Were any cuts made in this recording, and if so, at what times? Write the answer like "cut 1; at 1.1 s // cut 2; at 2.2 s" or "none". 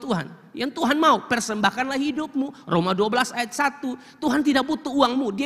none